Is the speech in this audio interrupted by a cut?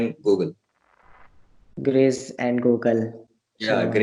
no; 0 cuts

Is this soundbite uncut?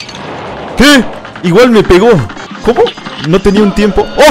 no; 1 cut; at 1.2 s

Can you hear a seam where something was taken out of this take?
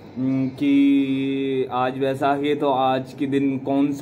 no; 0 cuts

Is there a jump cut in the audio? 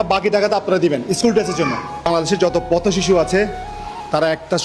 yes; 1 cut; at 2.1 s

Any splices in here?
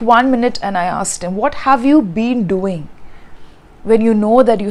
no; 0 cuts

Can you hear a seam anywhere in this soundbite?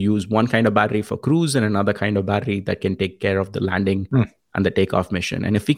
no; 0 cuts

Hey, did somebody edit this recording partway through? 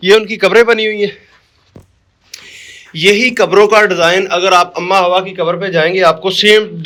no; 0 cuts

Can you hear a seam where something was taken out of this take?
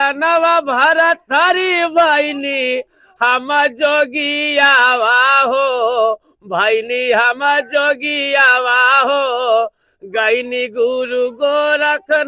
no; 0 cuts

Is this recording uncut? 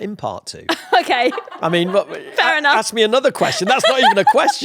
yes; 0 cuts

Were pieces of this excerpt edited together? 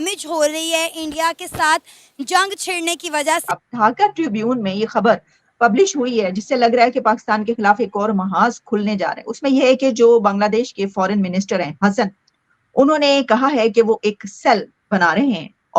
yes; 1 cut; at 3.7 s

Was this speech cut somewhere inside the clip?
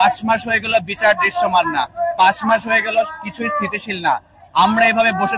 no; 0 cuts

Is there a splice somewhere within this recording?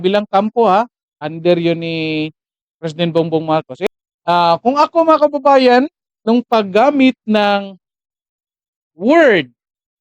yes; 1 cut; at 3.7 s

